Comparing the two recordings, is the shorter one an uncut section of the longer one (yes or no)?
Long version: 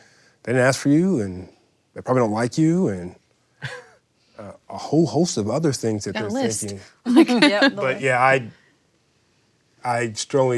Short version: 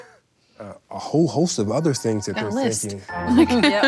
yes